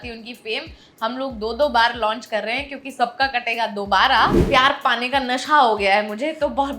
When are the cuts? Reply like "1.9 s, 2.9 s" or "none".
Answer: 4.4 s